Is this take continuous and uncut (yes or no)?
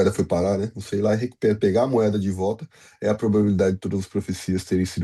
yes